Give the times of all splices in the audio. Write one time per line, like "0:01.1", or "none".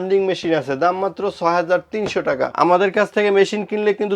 0:02.5